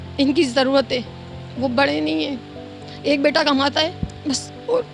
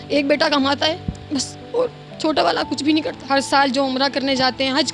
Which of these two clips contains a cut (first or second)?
second